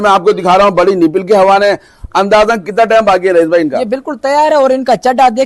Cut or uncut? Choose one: uncut